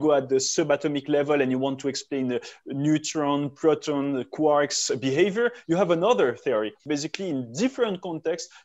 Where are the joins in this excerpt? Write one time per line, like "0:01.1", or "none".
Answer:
0:06.8